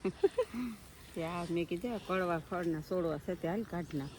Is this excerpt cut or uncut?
uncut